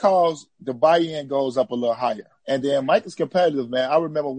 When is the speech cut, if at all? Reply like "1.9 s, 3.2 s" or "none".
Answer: 2.3 s